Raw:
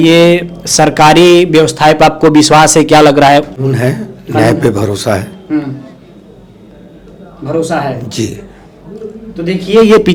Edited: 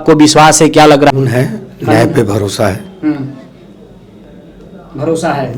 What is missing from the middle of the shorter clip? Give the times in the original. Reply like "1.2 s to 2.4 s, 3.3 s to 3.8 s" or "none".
3.3 s to 3.6 s